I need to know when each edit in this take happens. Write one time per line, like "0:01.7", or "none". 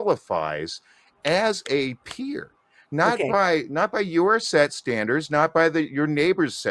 none